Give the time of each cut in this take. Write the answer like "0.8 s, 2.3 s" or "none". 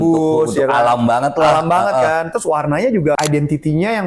3.2 s